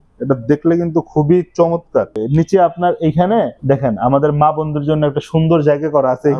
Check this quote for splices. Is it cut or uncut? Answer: cut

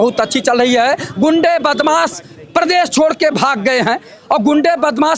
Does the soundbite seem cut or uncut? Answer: uncut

